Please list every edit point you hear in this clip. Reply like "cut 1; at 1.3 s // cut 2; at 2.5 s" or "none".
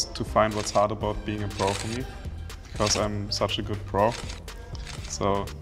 none